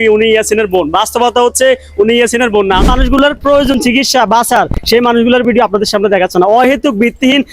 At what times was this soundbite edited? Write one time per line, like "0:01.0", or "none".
0:02.8